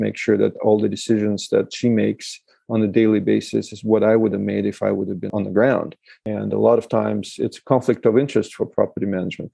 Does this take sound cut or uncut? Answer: cut